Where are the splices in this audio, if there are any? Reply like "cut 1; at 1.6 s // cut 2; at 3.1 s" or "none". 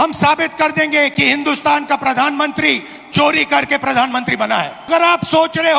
cut 1; at 4.9 s